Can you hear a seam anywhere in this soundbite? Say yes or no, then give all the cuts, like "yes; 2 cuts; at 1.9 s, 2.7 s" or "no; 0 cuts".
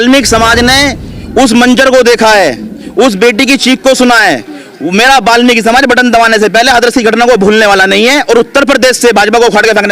no; 0 cuts